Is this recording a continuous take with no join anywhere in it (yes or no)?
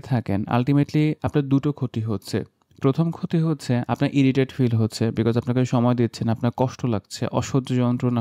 yes